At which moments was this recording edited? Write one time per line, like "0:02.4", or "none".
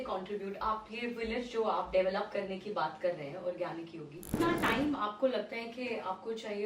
0:04.3